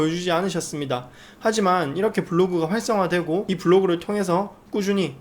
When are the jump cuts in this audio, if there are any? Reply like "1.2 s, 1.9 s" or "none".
3.5 s